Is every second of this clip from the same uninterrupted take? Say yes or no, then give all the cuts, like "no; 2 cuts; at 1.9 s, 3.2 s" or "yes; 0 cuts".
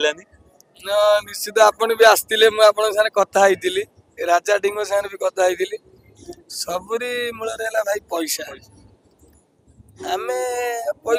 yes; 0 cuts